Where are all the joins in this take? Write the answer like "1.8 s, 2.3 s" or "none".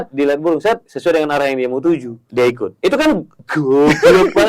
0.9 s, 2.2 s, 3.4 s